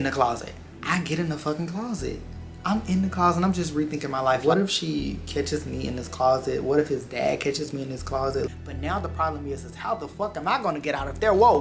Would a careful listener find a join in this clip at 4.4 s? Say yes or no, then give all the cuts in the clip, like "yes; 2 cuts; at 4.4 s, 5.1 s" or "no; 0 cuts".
yes; 2 cuts; at 4.4 s, 8.5 s